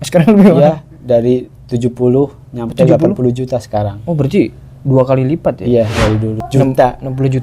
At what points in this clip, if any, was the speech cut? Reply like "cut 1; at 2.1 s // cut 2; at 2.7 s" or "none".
cut 1; at 6.4 s